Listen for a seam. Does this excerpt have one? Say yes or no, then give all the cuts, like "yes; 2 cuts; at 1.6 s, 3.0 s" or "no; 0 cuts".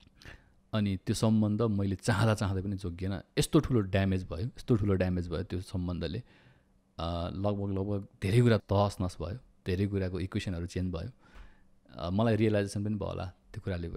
yes; 1 cut; at 8.6 s